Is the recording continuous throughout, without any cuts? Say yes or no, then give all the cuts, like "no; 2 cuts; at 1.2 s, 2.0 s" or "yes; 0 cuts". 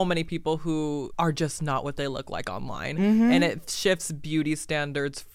no; 1 cut; at 1.1 s